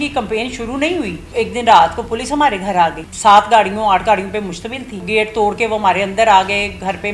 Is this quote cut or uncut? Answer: cut